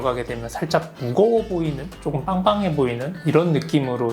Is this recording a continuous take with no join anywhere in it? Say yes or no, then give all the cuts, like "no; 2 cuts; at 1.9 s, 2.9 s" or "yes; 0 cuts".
yes; 0 cuts